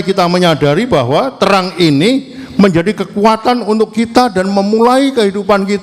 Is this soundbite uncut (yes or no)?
yes